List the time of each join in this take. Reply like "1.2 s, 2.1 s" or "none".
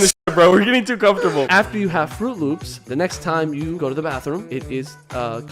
1.5 s, 2.7 s, 4.0 s